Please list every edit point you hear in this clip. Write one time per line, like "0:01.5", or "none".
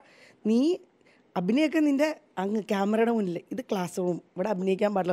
none